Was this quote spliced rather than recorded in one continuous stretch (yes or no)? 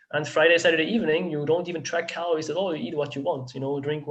no